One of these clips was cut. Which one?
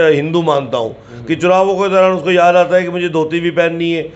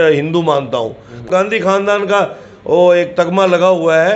second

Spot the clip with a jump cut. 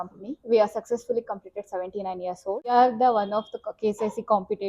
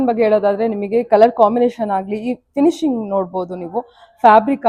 first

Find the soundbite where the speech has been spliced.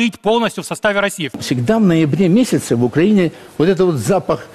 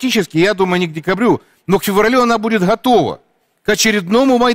first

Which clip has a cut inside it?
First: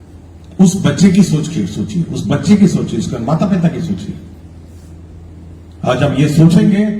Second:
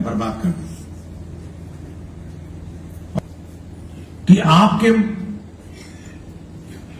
second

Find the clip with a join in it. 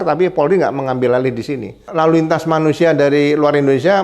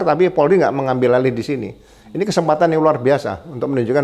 first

